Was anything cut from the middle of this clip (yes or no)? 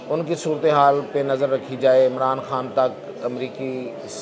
no